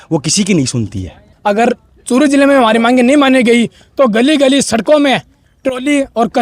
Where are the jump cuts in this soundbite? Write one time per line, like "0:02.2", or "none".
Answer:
0:01.3